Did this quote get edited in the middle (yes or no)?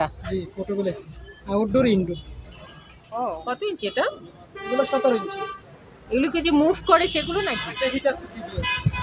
yes